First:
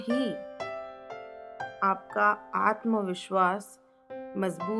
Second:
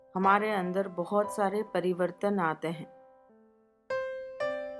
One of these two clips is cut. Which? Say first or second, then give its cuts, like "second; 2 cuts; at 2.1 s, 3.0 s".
second; 1 cut; at 3.3 s